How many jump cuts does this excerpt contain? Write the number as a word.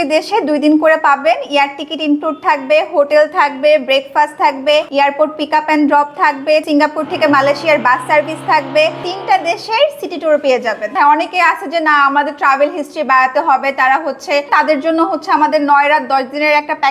five